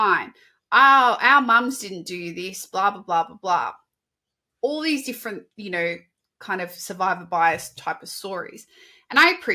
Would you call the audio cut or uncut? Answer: uncut